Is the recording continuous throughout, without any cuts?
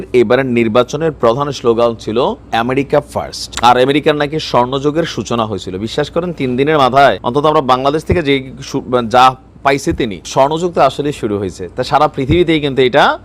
no; 4 cuts; at 2.4 s, 3.4 s, 7.2 s, 10.2 s

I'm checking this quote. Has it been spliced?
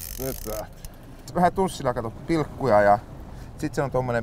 yes; 1 cut; at 1.3 s

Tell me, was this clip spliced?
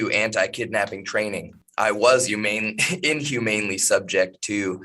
yes; 1 cut; at 1.6 s

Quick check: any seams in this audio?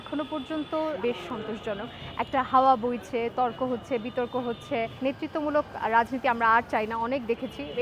yes; 2 cuts; at 1.0 s, 4.9 s

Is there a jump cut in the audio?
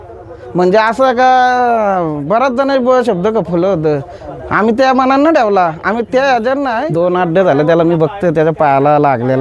yes; 1 cut; at 6.8 s

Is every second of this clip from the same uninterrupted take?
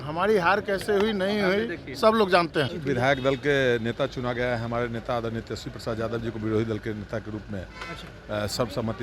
yes; 0 cuts

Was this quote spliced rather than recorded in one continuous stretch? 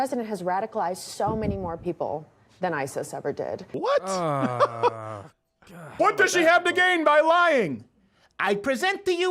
yes; 2 cuts; at 3.7 s, 5.9 s

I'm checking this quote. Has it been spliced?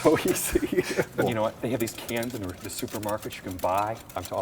yes; 1 cut; at 1.2 s

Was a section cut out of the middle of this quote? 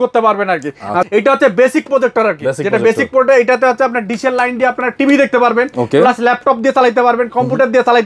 yes; 1 cut; at 1.4 s

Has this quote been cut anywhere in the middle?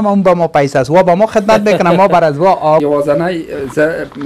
yes; 1 cut; at 2.8 s

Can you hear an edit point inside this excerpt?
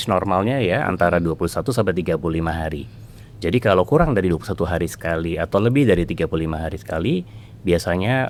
no; 0 cuts

